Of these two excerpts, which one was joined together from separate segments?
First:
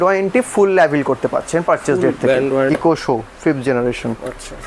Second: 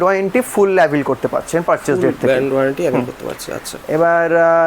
first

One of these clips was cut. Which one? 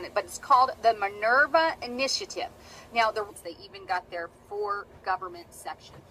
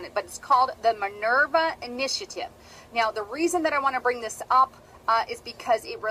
second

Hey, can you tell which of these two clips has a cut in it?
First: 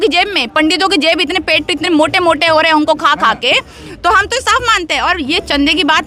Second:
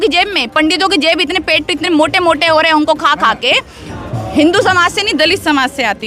second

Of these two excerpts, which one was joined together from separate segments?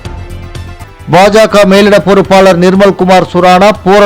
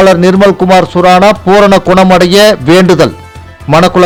first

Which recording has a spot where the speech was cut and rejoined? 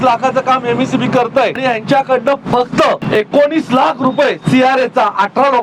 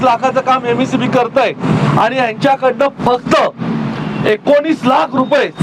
first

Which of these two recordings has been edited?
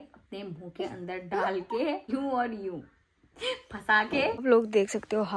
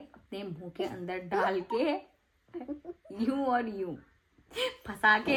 first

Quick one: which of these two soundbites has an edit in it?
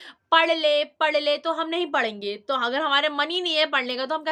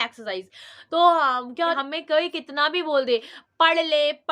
second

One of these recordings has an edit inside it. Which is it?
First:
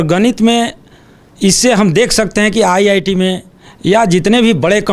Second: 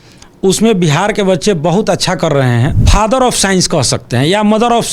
second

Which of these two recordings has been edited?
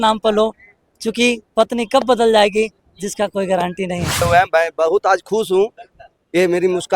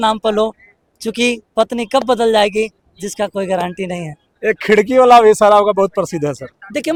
first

